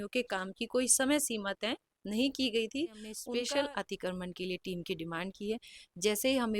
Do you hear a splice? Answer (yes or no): yes